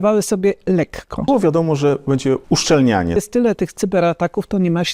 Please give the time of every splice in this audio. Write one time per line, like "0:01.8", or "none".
0:01.3
0:02.4
0:03.2